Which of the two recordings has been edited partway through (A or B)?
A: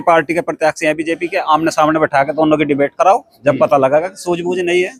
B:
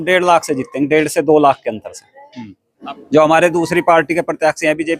B